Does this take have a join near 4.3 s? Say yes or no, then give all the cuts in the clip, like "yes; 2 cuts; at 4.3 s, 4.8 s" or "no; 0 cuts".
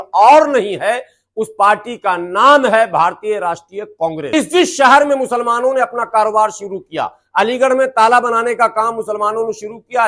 yes; 1 cut; at 4.3 s